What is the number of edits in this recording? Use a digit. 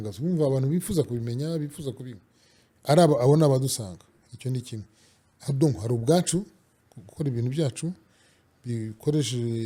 0